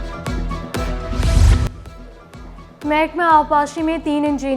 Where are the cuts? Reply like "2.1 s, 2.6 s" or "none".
1.1 s